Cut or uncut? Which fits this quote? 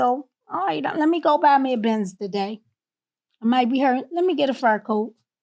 uncut